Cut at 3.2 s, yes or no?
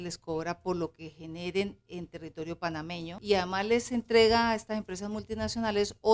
yes